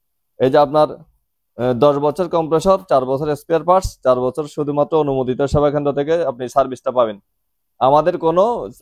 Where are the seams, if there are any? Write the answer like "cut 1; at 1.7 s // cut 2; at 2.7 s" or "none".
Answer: none